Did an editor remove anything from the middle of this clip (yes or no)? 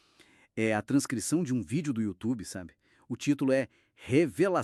no